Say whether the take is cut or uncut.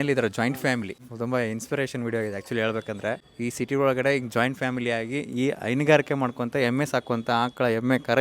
cut